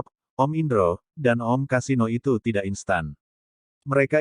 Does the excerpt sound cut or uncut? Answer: uncut